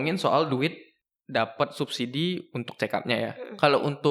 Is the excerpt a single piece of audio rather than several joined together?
yes; 0 cuts

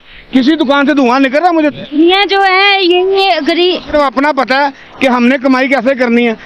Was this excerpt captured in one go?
no; 1 cut; at 1.7 s

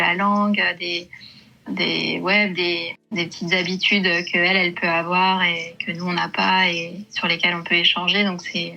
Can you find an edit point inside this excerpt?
no; 0 cuts

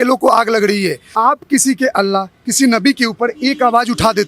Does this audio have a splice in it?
yes; 1 cut; at 1.1 s

